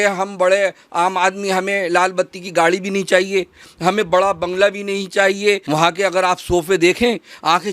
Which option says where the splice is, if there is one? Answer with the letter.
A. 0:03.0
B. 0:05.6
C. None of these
B